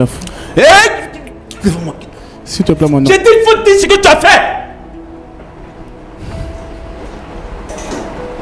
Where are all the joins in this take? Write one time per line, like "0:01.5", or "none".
none

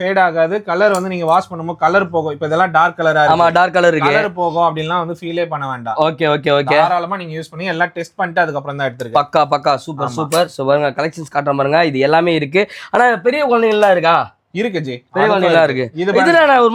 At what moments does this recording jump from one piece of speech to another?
none

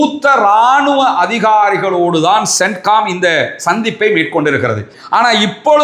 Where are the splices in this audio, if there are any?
0:04.9

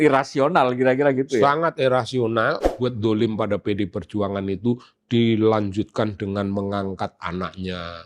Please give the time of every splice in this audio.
0:02.8

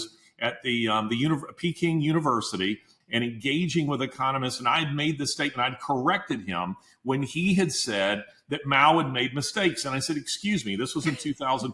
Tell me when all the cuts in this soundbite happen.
0:02.9

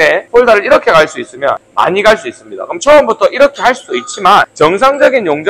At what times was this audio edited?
none

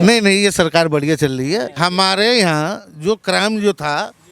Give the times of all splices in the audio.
0:01.7

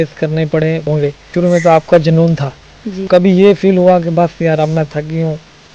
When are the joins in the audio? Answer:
0:00.9
0:03.1

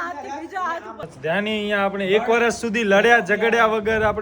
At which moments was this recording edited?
0:01.1

